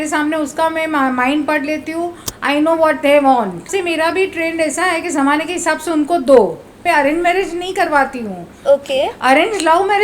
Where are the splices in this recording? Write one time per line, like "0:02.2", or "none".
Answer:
0:03.7
0:06.7